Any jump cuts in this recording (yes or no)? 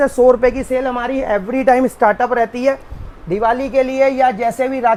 no